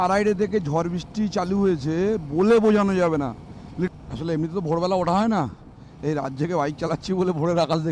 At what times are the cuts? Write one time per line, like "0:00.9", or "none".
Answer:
0:03.9